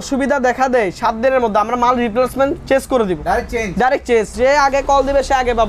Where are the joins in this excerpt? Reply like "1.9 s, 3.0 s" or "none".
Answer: 4.3 s